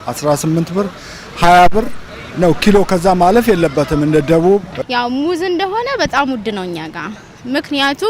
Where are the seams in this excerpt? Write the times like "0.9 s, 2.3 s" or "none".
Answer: 4.7 s

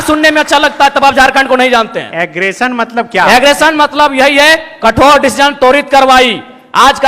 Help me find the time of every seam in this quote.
2.4 s

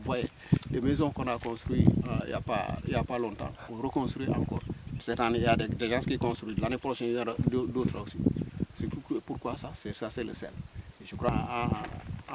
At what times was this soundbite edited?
11.3 s

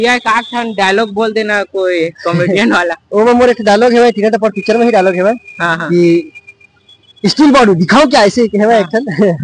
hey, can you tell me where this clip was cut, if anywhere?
none

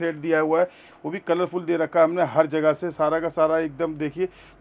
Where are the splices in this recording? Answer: none

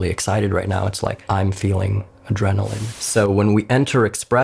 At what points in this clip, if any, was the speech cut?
1.2 s, 2.8 s

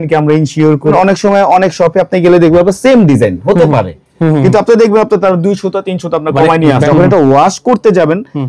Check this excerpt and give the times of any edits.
0.9 s, 6.8 s

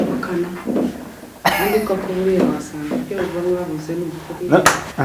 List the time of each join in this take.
none

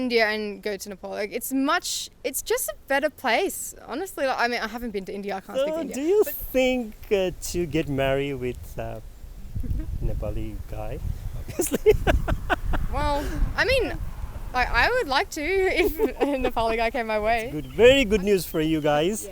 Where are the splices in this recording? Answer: 5.5 s, 17.6 s

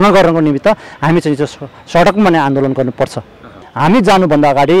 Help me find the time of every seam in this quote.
3.6 s

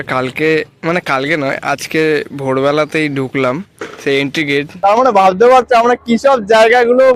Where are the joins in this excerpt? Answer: 4.7 s

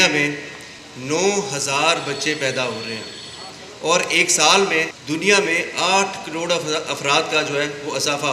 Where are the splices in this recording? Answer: 5.0 s

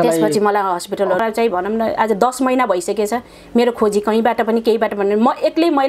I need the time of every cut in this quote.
1.2 s

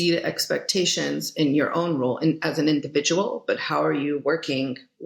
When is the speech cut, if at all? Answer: none

